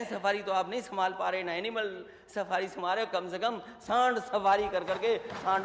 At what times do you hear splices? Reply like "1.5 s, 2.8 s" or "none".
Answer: none